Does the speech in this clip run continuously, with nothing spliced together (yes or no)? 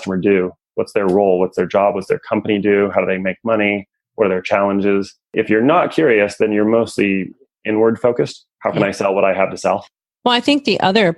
no